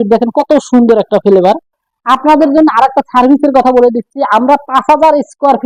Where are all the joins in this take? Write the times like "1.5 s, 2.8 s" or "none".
none